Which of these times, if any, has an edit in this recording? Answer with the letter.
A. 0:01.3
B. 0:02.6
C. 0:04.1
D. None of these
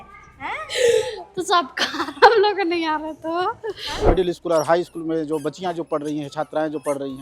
C